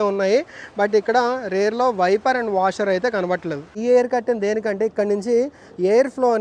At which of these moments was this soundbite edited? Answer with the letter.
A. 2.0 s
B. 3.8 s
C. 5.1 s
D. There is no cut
B